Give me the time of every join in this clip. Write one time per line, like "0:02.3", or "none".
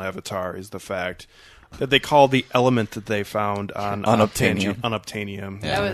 0:01.7